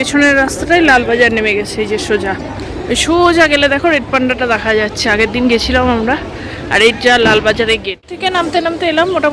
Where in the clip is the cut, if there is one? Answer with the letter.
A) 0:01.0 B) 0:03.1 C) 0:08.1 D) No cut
C